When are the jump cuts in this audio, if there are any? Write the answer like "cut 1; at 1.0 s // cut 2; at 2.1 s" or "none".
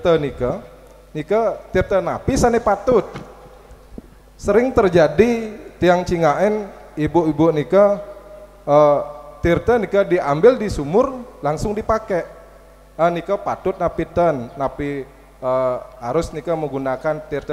none